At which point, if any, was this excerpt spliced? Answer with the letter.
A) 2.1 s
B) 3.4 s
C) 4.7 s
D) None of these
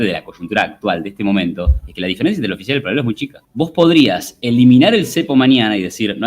B